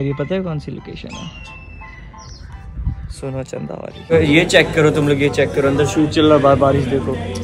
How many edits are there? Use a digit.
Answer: 1